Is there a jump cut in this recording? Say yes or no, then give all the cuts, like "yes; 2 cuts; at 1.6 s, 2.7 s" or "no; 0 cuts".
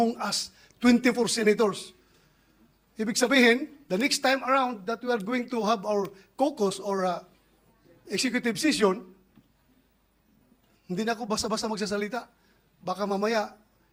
no; 0 cuts